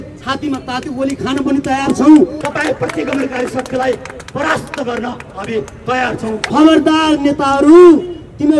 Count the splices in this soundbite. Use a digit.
2